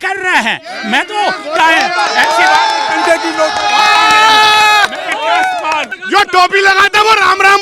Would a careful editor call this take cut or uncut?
cut